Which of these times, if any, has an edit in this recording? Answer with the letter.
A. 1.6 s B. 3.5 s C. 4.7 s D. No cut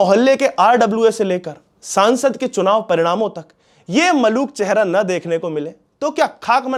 D